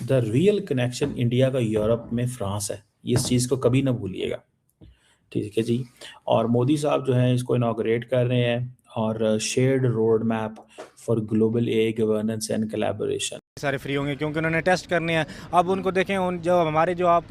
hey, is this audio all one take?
no; 1 cut; at 13.6 s

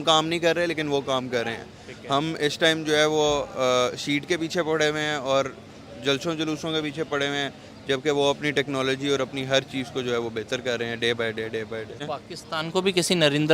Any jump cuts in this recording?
yes; 1 cut; at 12.0 s

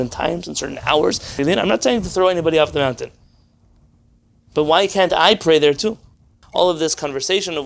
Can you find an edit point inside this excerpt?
yes; 2 cuts; at 1.3 s, 6.4 s

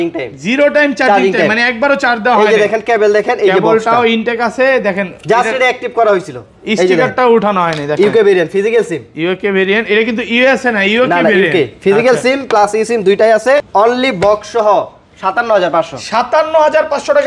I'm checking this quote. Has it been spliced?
yes; 1 cut; at 13.7 s

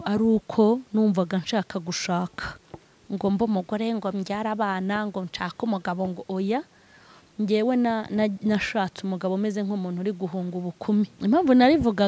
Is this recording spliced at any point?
yes; 1 cut; at 11.2 s

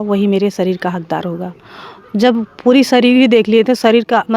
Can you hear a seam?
no; 0 cuts

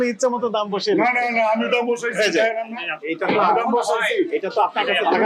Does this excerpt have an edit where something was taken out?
no; 0 cuts

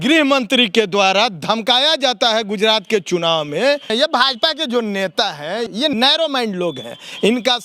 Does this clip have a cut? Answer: yes; 2 cuts; at 3.9 s, 5.8 s

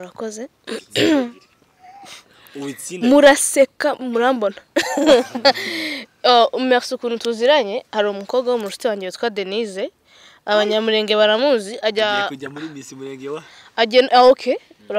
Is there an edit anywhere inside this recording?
no; 0 cuts

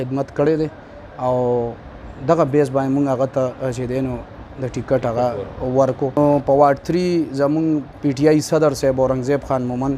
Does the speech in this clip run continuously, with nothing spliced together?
no; 1 cut; at 6.2 s

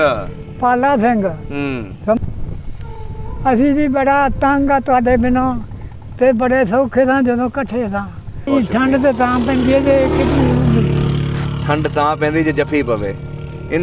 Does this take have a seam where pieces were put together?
yes; 2 cuts; at 2.2 s, 8.5 s

